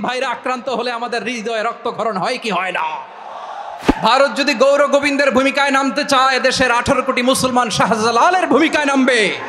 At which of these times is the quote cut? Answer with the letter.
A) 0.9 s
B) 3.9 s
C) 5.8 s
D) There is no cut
B